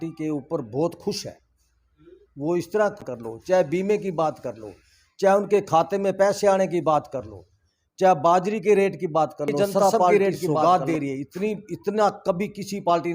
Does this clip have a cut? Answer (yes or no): yes